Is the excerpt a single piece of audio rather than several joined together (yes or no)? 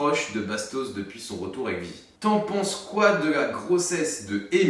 no